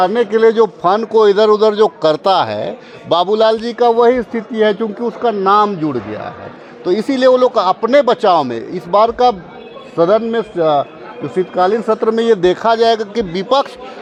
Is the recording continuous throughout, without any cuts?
yes; 0 cuts

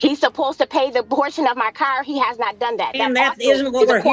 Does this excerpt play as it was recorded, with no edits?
yes; 0 cuts

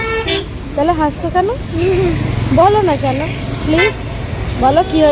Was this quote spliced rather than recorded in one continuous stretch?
no; 0 cuts

